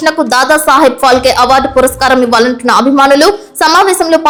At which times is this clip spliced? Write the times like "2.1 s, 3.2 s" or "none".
none